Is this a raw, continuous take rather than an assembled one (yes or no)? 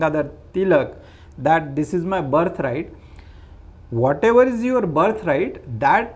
yes